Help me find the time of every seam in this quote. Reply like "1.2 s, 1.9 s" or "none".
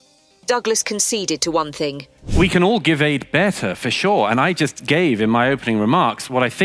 none

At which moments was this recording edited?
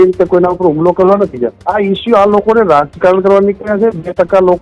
1.6 s

